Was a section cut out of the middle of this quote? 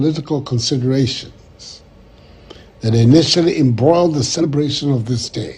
yes; 1 cut; at 4.4 s

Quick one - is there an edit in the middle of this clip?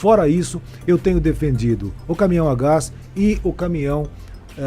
no; 0 cuts

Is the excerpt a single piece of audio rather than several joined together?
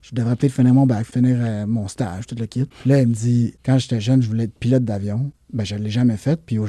no; 4 cuts; at 1.0 s, 2.7 s, 3.6 s, 5.4 s

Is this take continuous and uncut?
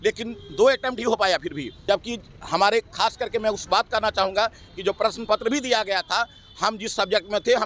no; 1 cut; at 1.7 s

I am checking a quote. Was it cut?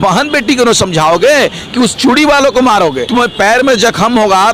yes; 1 cut; at 3.0 s

